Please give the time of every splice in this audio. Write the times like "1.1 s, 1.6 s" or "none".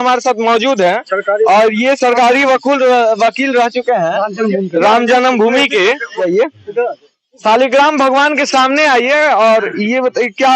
6.2 s

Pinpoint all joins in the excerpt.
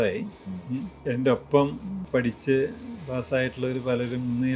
0.9 s, 1.9 s

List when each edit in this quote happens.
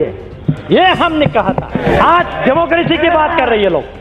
1.9 s

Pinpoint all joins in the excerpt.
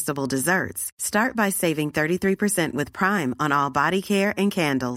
none

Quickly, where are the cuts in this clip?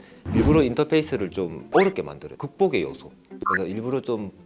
1.6 s

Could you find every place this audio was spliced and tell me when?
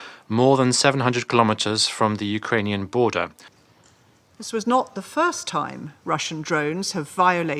3.4 s

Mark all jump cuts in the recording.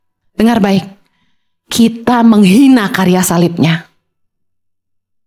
none

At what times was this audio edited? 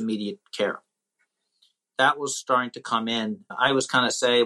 1.8 s, 3.5 s

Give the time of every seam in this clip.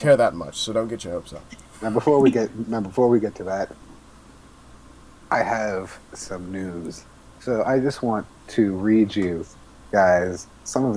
none

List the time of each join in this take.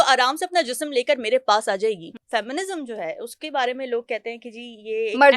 2.2 s

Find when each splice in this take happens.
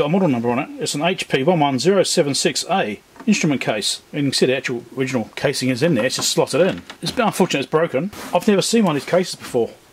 4.0 s, 5.3 s, 6.9 s, 8.2 s

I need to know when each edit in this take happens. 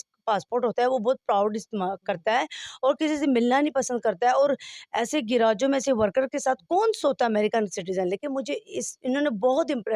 none

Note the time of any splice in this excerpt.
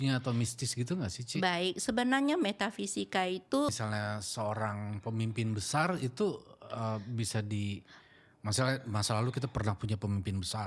3.7 s

